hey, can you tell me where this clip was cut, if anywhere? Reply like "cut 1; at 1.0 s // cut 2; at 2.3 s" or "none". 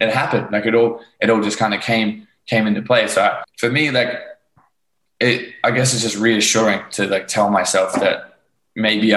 cut 1; at 3.5 s